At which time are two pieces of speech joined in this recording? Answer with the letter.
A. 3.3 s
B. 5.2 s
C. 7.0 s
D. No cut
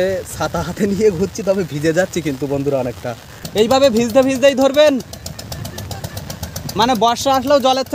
A